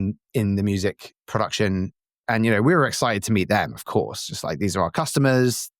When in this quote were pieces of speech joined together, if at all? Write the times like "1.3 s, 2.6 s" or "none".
1.1 s, 2.2 s

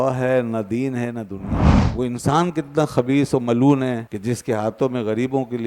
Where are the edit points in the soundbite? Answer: 1.6 s, 4.1 s

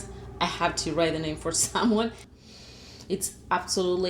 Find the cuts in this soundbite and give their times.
2.2 s

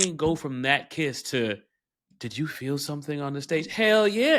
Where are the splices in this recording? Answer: none

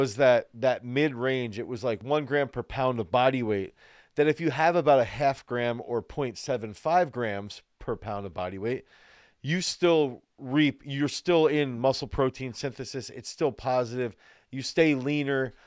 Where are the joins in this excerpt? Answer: 2.0 s

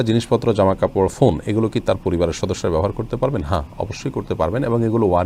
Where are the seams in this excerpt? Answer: none

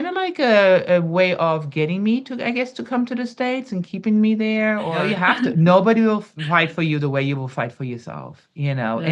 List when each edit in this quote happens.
5.1 s

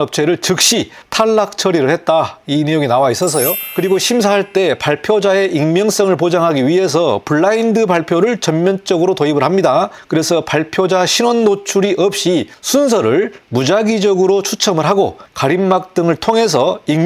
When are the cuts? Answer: 1.0 s, 3.6 s

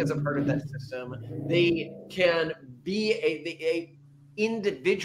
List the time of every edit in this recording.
none

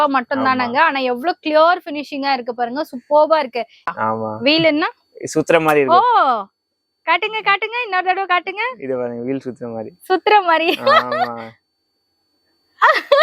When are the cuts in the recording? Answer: 3.9 s

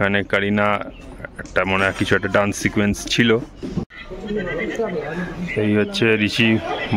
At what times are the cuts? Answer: 3.9 s

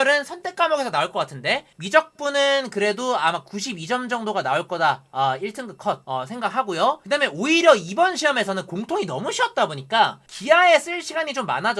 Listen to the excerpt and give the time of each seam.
none

